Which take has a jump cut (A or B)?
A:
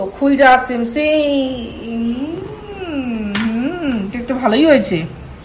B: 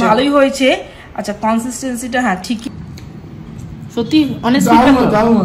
B